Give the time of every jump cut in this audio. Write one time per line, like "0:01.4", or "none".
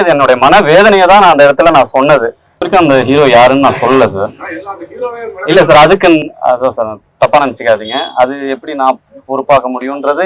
0:02.6